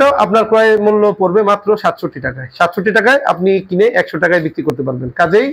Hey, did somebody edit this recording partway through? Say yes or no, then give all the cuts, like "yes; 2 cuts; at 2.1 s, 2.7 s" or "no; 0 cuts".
no; 0 cuts